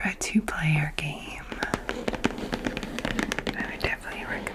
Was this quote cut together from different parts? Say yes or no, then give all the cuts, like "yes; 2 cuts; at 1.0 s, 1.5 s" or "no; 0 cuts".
no; 0 cuts